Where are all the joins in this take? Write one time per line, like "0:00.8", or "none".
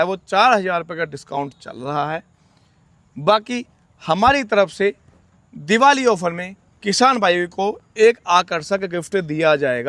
none